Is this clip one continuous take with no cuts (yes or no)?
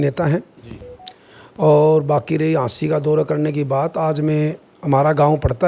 yes